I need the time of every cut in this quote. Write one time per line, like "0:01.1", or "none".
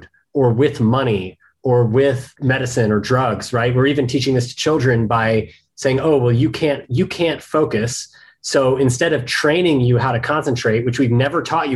none